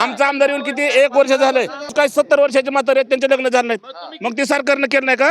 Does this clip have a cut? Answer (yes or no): yes